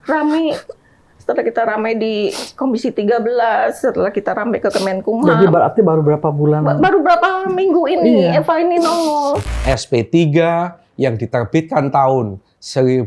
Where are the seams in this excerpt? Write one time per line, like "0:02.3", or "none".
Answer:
0:09.5